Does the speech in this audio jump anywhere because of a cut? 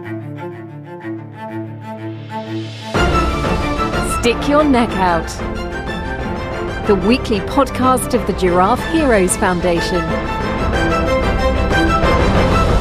no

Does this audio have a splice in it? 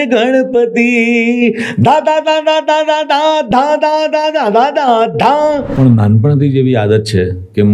yes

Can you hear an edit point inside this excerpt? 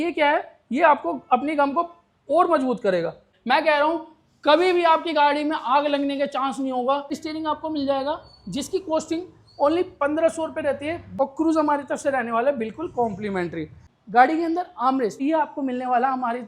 yes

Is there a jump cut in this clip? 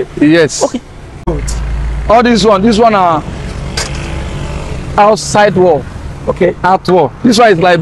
yes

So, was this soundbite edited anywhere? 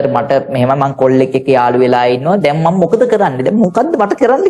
no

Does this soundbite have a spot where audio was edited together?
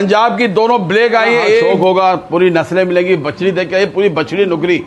yes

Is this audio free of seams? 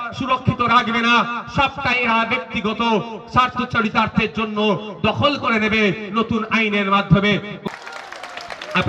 no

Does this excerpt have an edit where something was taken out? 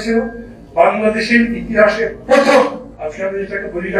yes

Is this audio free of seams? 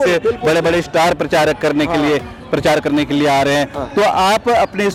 yes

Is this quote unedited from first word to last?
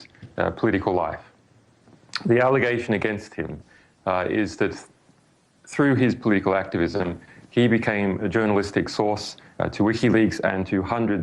no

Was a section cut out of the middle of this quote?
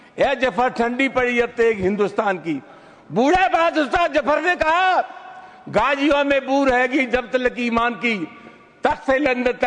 no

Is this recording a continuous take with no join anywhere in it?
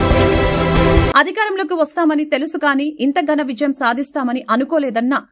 no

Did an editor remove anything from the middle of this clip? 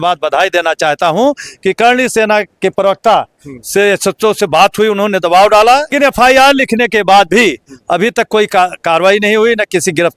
no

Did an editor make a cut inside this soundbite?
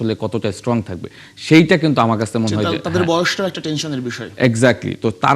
no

